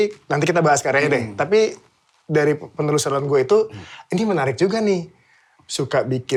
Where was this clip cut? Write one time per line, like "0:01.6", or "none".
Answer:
none